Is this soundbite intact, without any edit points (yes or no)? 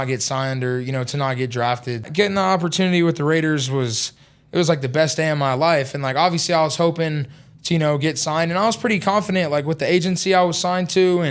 no